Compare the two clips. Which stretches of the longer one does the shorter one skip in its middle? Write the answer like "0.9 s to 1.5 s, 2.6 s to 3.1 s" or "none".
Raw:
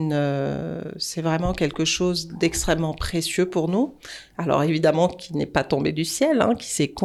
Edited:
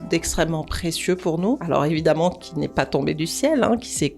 3.9 s to 4.4 s